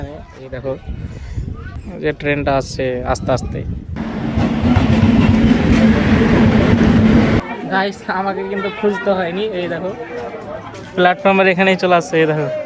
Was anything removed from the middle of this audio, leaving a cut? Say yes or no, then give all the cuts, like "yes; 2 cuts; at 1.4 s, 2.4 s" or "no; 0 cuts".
yes; 3 cuts; at 1.7 s, 4.0 s, 7.4 s